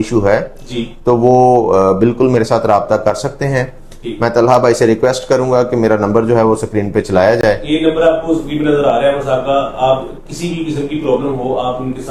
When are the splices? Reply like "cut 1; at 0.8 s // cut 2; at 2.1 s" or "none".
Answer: none